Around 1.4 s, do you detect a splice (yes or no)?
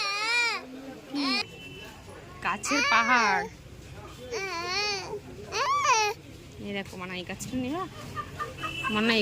yes